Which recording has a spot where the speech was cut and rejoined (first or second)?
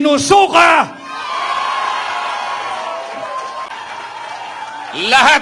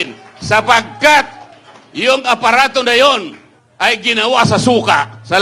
first